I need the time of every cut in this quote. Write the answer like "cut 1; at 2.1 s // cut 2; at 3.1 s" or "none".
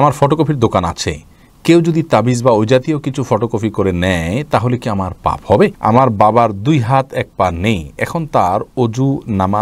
cut 1; at 5.8 s